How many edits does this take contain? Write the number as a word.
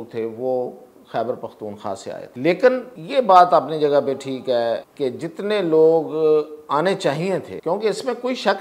four